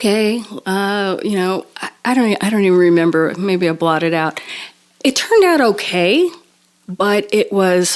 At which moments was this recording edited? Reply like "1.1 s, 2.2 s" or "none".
none